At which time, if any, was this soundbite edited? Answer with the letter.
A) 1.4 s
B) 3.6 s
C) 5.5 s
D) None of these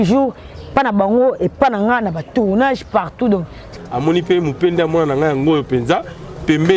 B